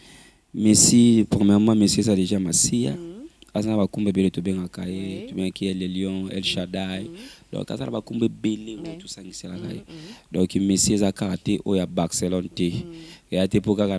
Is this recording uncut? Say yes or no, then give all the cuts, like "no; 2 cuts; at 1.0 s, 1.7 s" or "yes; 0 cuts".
yes; 0 cuts